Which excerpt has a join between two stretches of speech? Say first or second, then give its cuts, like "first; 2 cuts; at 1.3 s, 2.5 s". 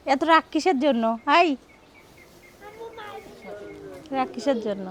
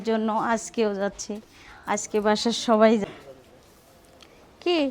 second; 1 cut; at 3.0 s